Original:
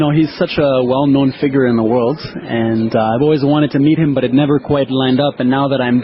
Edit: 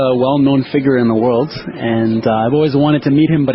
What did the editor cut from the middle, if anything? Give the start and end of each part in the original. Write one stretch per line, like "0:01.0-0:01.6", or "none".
none